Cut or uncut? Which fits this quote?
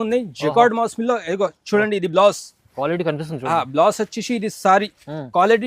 uncut